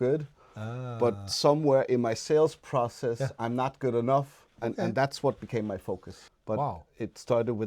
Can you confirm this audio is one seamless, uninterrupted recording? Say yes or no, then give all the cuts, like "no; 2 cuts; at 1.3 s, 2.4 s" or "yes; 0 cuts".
no; 2 cuts; at 4.6 s, 6.3 s